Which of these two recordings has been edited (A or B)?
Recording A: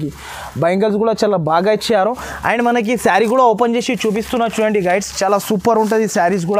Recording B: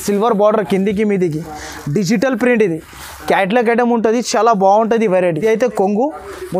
B